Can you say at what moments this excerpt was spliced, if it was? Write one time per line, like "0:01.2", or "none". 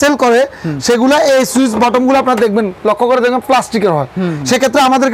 none